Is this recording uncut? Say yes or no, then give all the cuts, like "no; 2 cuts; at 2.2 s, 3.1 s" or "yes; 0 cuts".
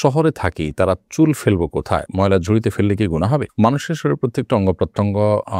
yes; 0 cuts